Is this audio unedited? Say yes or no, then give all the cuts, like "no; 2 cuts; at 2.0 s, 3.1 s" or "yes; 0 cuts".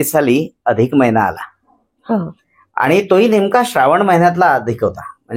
yes; 0 cuts